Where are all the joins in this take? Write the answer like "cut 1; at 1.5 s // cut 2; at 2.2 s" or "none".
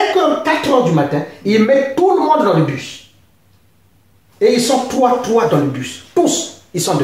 none